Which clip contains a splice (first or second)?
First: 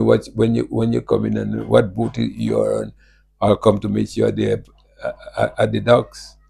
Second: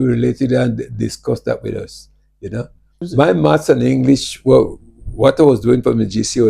second